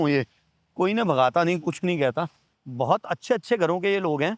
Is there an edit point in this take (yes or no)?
no